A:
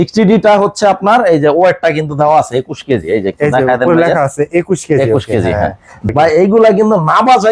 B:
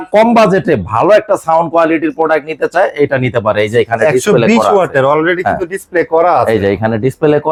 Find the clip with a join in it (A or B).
A